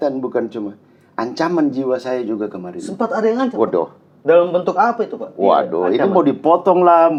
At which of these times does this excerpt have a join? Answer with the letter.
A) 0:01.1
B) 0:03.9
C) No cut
C